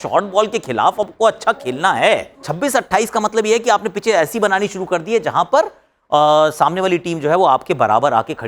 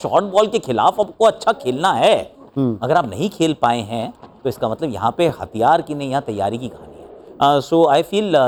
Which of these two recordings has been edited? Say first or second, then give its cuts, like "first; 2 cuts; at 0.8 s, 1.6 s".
first; 1 cut; at 2.5 s